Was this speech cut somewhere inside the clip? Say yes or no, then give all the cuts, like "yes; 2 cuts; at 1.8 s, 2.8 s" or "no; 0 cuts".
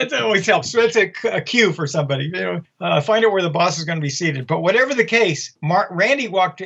no; 0 cuts